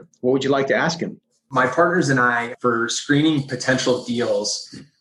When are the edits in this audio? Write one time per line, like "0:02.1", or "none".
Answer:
0:01.4
0:02.5